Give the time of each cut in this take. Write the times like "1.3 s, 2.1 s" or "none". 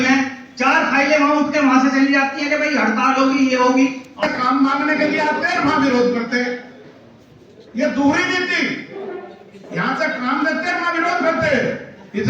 4.2 s